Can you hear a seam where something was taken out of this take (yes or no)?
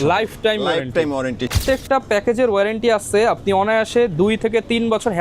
yes